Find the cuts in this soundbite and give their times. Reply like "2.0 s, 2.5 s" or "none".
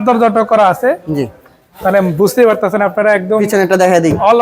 none